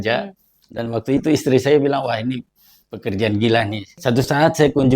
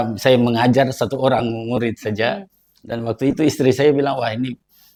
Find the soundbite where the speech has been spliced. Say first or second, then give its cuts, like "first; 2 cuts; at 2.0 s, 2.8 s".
first; 1 cut; at 3.8 s